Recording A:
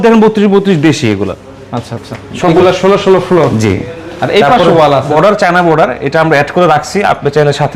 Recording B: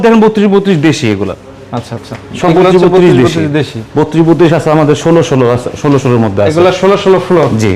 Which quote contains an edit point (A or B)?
A